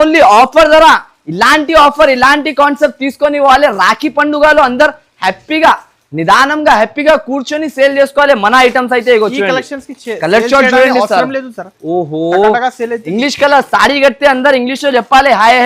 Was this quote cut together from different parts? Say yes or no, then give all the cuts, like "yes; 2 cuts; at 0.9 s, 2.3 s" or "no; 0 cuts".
no; 0 cuts